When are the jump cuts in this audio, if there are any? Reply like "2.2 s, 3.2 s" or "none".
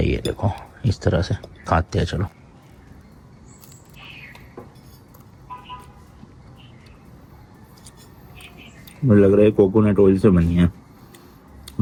none